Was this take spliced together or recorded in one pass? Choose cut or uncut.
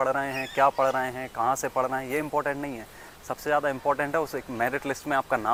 uncut